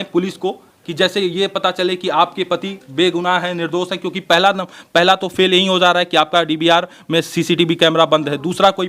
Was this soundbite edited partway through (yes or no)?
no